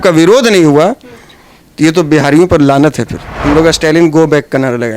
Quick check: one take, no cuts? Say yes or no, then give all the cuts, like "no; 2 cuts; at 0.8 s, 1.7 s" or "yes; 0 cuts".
no; 1 cut; at 3.4 s